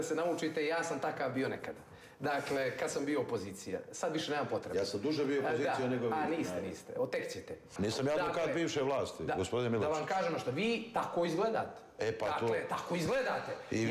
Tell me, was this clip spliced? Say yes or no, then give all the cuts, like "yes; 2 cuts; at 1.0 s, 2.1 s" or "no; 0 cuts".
yes; 1 cut; at 7.7 s